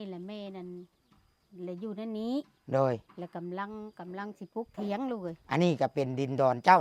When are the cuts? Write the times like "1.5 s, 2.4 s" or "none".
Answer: none

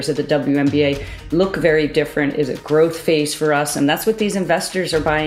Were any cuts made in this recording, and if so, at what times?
none

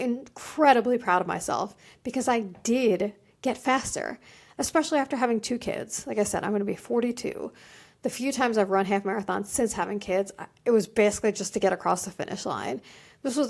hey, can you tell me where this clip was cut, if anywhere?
none

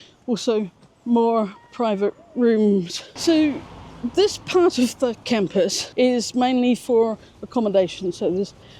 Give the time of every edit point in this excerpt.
3.1 s

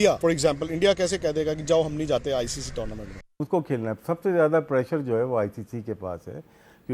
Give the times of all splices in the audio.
3.4 s

